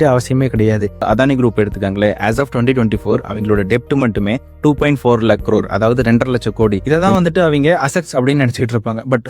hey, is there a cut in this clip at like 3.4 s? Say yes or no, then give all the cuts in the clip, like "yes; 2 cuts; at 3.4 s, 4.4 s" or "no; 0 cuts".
no; 2 cuts; at 1.0 s, 6.8 s